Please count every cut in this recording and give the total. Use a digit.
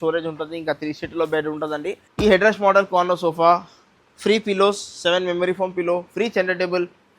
1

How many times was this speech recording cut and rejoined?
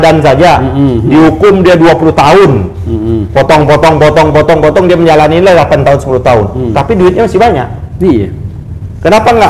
0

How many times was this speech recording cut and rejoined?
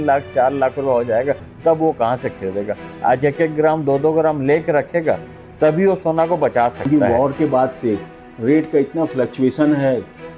1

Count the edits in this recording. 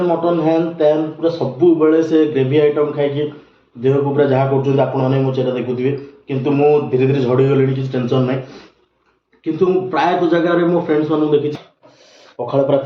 1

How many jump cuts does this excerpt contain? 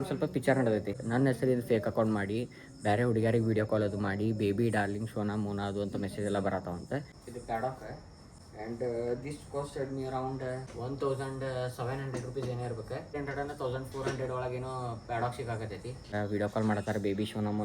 5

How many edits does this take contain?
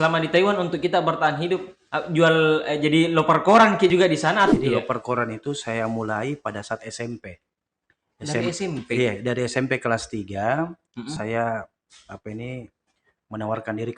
1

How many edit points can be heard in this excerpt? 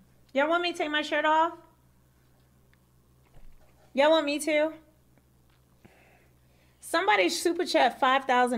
0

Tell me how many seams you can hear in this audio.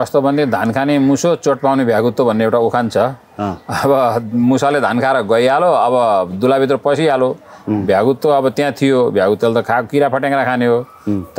0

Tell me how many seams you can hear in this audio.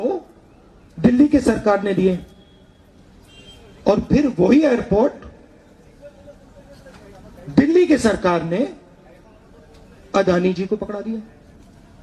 0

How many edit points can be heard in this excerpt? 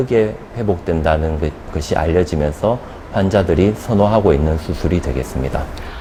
0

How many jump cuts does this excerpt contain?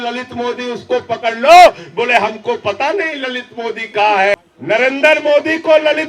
1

